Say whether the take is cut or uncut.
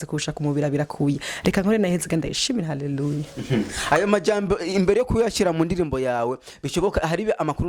uncut